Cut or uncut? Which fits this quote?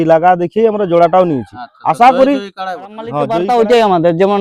cut